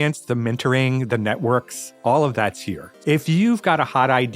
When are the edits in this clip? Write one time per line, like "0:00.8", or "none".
0:02.9